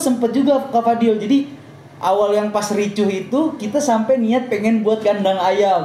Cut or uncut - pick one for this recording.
uncut